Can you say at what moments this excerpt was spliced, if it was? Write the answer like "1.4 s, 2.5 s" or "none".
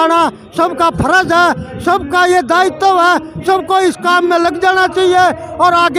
none